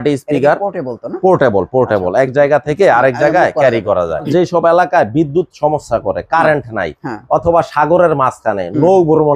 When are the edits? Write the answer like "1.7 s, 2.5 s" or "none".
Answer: 4.3 s